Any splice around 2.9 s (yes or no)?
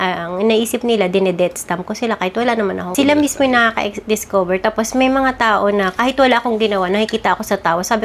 yes